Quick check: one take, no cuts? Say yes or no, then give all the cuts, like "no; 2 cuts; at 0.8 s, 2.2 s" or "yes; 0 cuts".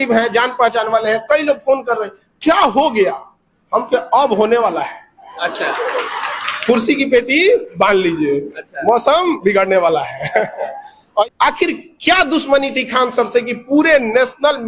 no; 1 cut; at 11.2 s